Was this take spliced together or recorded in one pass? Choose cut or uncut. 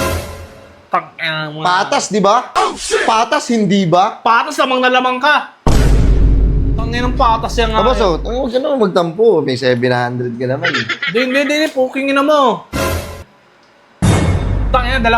cut